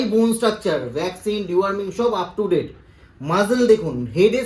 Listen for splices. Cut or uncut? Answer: uncut